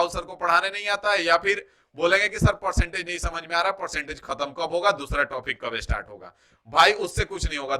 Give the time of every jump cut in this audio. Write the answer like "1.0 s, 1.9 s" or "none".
none